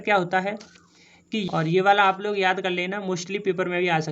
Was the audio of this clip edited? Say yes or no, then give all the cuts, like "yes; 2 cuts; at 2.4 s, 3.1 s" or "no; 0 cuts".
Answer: yes; 1 cut; at 1.5 s